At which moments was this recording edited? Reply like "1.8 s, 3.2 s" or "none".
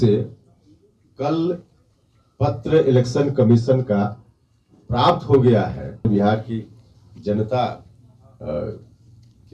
6.0 s

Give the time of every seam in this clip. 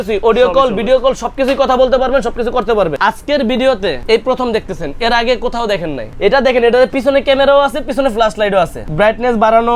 2.9 s, 4.0 s, 6.0 s, 8.8 s

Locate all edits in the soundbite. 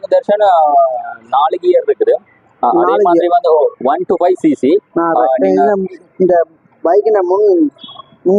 none

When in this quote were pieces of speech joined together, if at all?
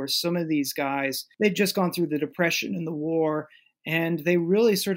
1.2 s

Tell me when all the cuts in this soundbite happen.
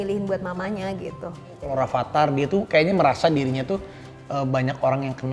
1.7 s

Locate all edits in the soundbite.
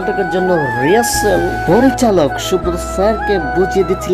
none

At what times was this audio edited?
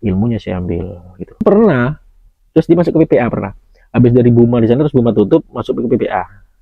1.4 s

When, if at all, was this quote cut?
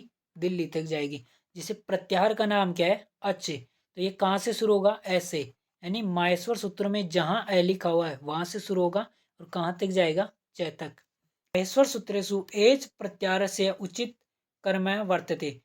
11.5 s

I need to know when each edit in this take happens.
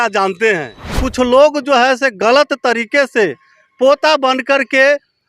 1.0 s

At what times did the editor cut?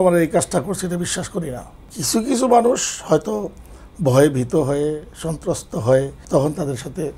1.8 s, 6.2 s

